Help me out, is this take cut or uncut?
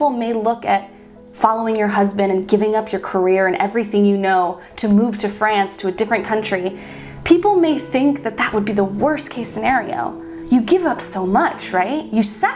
uncut